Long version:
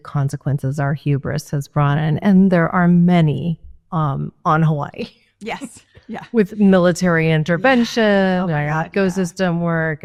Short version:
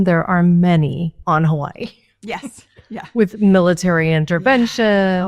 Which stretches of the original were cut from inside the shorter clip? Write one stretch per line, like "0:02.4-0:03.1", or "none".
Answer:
0:03.6-0:04.4